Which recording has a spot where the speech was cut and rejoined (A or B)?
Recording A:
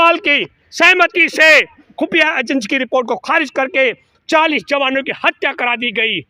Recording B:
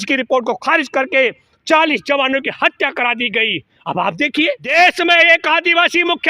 B